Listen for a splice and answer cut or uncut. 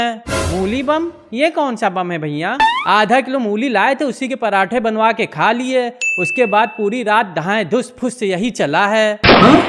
uncut